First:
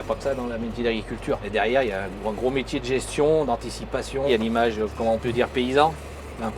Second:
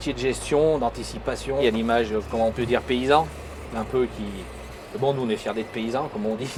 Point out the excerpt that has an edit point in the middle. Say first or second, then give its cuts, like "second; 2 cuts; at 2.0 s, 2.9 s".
first; 1 cut; at 1.5 s